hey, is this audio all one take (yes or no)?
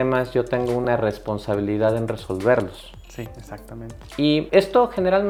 yes